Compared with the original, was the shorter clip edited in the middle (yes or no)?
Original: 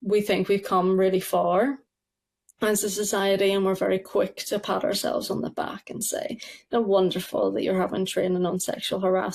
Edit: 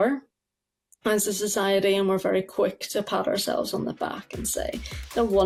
no